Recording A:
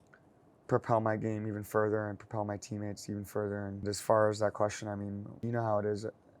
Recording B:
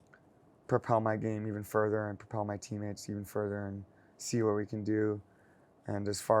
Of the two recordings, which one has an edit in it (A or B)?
A